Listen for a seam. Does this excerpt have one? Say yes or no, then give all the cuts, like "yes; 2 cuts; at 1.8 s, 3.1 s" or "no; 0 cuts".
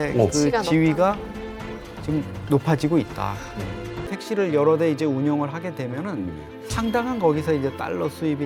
yes; 1 cut; at 4.1 s